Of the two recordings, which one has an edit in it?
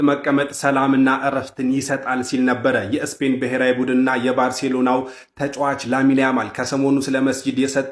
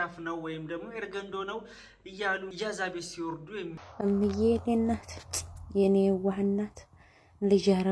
second; 2 cuts; at 2.5 s, 4.0 s

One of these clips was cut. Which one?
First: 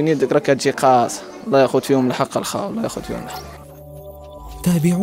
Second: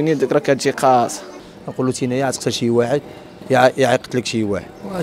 second; 1 cut; at 1.3 s

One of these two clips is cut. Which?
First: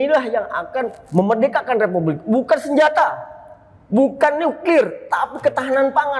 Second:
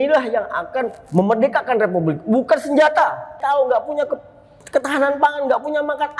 second; 1 cut; at 3.3 s

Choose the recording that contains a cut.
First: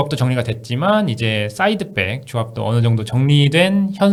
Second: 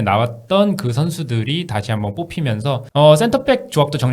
second; 1 cut; at 2.8 s

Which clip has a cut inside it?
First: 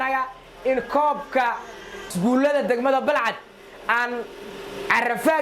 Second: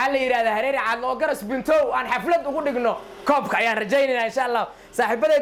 first; 1 cut; at 2.0 s

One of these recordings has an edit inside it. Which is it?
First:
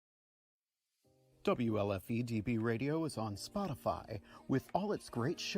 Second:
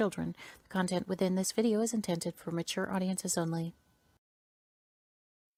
first; 1 cut; at 2.4 s

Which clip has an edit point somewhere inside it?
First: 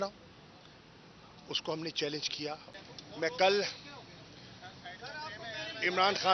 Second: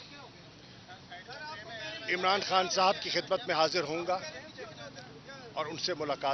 first; 1 cut; at 2.7 s

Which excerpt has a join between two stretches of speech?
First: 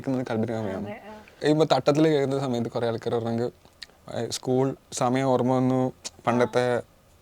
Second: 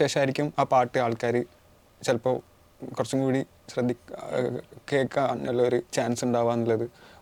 first; 1 cut; at 1.4 s

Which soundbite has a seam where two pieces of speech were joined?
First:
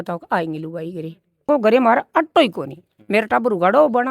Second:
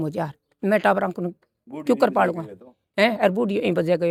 first; 1 cut; at 1.5 s

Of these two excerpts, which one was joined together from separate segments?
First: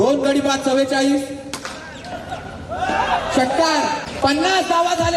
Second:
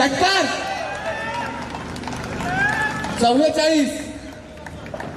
first; 1 cut; at 4.1 s

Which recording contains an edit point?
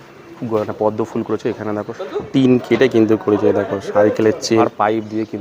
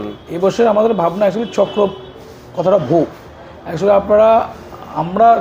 first; 2 cuts; at 2.0 s, 4.6 s

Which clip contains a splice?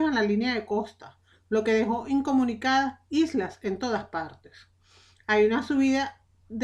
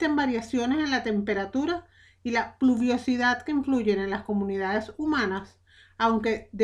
first; 1 cut; at 1.3 s

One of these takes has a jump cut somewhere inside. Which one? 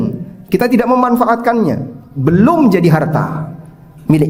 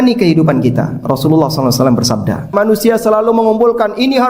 second; 1 cut; at 2.5 s

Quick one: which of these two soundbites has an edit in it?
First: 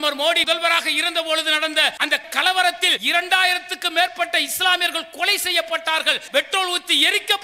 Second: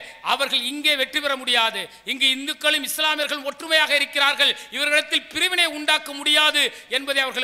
first; 2 cuts; at 2.9 s, 6.2 s

